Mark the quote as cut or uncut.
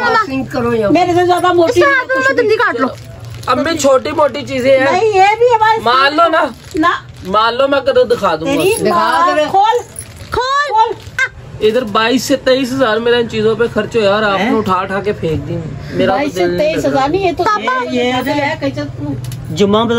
cut